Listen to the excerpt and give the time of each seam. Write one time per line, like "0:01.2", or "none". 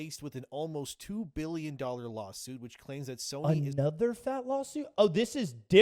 none